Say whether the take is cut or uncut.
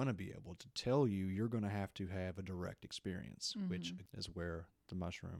cut